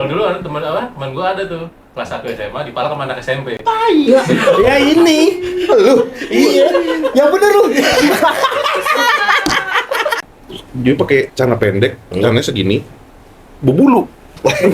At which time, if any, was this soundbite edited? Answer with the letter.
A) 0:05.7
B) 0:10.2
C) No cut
B